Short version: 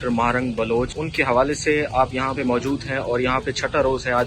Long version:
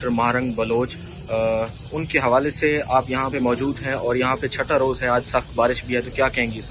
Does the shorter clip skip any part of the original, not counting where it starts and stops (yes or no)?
yes